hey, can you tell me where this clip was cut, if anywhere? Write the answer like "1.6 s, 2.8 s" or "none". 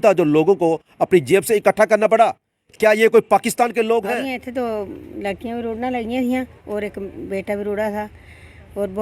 4.2 s